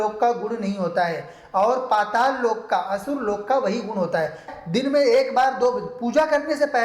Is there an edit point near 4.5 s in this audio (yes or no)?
yes